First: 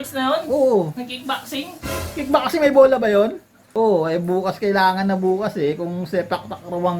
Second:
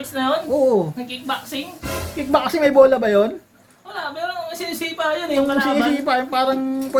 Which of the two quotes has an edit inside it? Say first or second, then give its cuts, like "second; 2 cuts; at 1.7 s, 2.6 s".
first; 1 cut; at 3.7 s